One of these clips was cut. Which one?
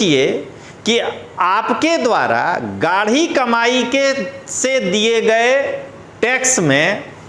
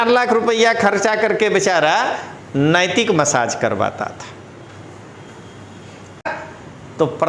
second; 1 cut; at 6.3 s

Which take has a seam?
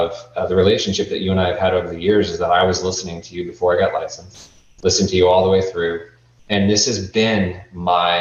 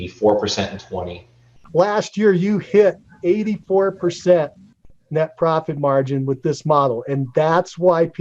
second; 1 cut; at 1.6 s

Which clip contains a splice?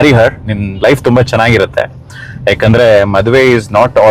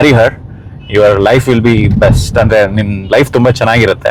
first; 1 cut; at 1.0 s

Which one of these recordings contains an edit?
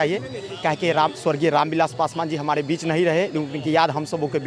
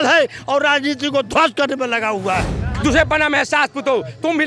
second; 1 cut; at 2.6 s

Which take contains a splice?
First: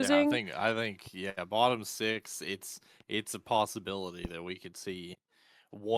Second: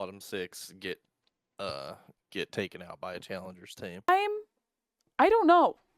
second; 1 cut; at 4.1 s

